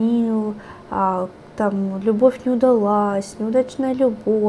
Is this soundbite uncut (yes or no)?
yes